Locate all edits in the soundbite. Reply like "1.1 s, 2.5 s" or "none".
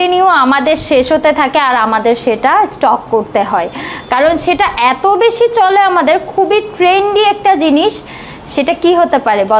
none